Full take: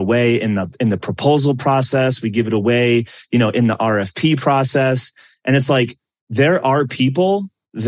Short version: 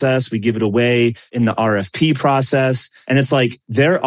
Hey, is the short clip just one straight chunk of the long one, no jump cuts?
no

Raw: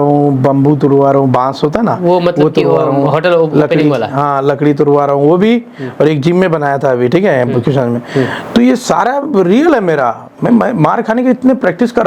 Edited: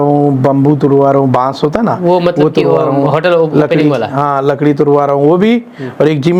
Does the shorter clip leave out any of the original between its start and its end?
no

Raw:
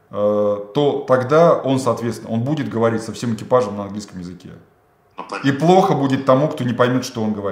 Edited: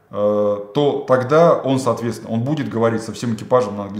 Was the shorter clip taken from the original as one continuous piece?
yes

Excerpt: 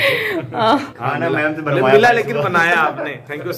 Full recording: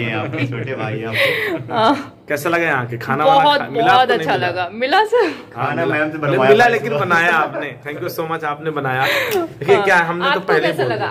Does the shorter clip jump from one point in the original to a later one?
yes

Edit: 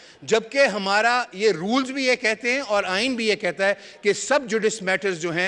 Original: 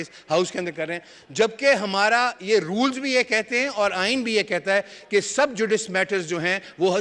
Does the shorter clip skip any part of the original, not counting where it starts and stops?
no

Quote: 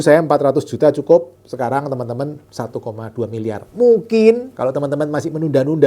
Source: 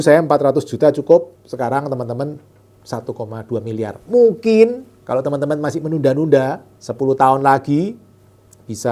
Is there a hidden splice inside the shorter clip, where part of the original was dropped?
yes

